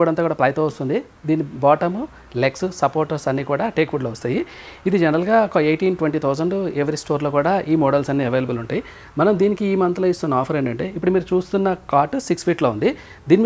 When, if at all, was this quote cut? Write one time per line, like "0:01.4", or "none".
none